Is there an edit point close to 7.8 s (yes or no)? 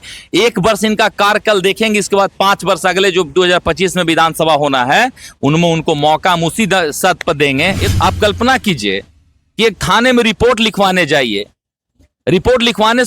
yes